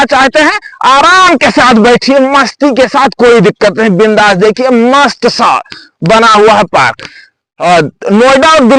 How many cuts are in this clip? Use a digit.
0